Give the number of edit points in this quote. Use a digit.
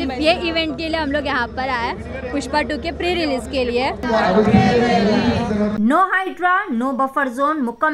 2